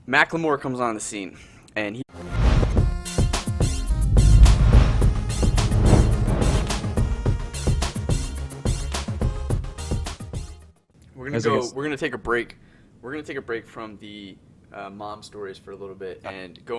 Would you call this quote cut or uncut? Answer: uncut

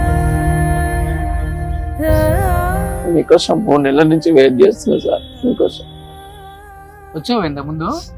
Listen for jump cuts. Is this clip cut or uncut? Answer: uncut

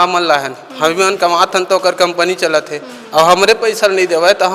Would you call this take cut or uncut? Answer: uncut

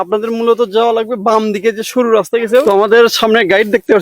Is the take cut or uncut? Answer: cut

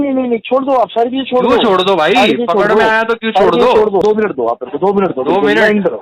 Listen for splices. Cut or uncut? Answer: cut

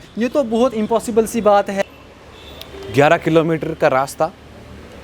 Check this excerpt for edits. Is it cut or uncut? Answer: cut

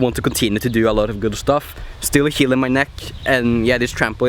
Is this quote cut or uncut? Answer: uncut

